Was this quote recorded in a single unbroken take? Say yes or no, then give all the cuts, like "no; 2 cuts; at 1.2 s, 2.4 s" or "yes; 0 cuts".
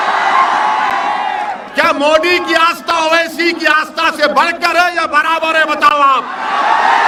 yes; 0 cuts